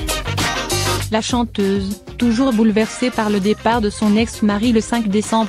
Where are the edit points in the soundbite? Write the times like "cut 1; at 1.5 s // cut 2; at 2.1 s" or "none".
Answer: cut 1; at 1.1 s